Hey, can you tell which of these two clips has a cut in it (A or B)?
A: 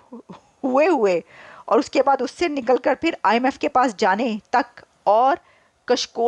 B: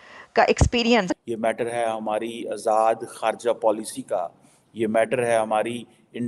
B